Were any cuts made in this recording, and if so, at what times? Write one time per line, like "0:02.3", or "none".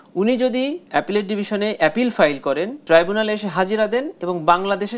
0:00.8
0:02.7